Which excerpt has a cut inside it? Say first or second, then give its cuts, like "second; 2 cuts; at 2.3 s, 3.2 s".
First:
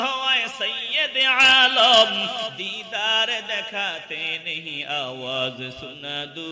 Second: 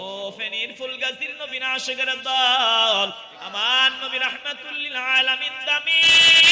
second; 1 cut; at 3.2 s